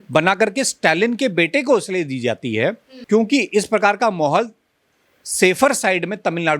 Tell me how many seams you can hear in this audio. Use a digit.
1